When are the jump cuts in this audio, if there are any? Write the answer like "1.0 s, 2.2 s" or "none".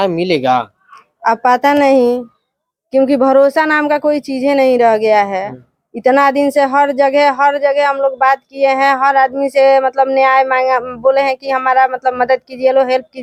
none